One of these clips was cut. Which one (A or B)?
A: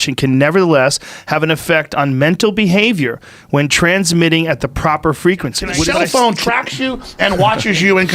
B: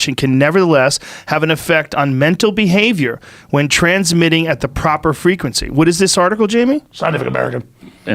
A